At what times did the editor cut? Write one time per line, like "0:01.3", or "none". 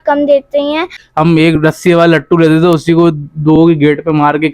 0:00.9